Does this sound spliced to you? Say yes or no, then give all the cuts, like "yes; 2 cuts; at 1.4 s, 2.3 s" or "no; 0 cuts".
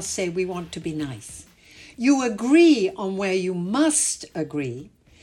no; 0 cuts